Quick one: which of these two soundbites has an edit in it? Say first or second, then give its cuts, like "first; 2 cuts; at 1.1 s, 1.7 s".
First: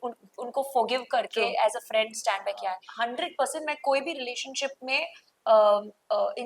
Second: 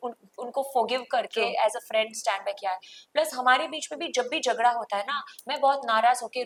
first; 1 cut; at 2.9 s